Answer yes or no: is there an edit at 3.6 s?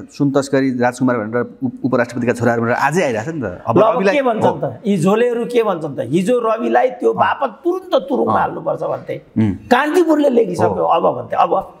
no